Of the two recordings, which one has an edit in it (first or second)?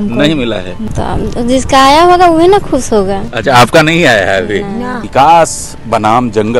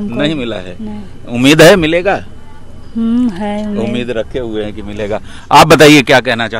first